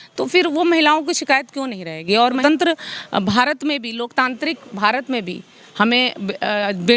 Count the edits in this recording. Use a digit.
1